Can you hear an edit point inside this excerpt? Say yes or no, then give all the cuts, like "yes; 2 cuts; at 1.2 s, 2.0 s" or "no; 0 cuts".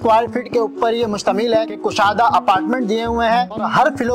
yes; 1 cut; at 1.8 s